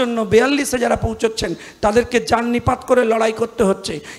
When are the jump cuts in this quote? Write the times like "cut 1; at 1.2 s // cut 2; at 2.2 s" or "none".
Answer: none